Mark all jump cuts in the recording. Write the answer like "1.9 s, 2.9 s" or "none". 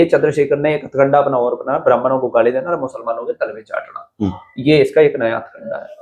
none